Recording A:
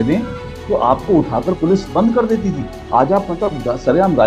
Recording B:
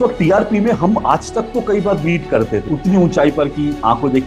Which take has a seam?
B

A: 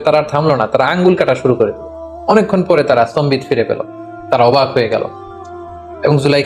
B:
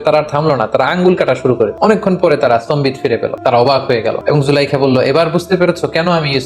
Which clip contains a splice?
B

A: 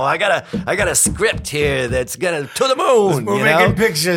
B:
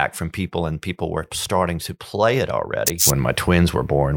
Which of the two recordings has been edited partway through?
B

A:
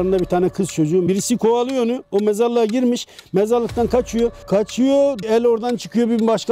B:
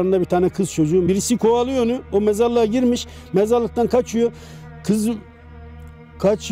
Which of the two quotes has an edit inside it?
A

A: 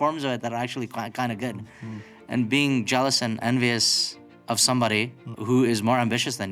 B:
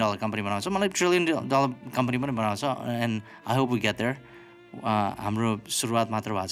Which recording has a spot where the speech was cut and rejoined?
A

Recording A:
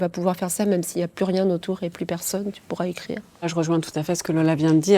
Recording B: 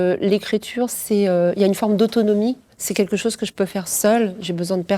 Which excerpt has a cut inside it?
A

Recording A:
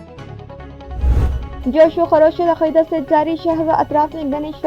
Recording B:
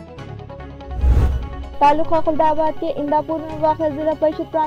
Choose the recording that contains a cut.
A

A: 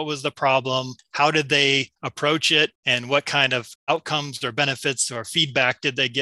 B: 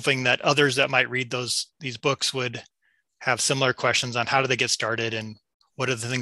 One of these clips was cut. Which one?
A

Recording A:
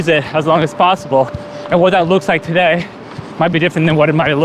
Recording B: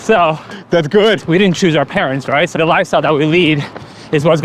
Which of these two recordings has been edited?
B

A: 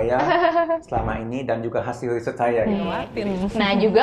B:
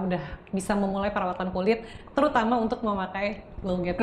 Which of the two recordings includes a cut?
A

